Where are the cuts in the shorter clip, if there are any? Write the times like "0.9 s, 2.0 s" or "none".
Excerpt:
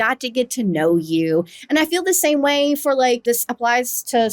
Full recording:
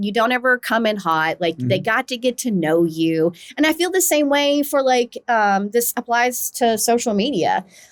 3.2 s